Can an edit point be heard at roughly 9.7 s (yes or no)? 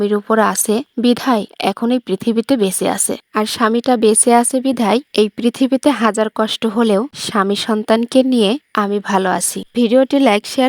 yes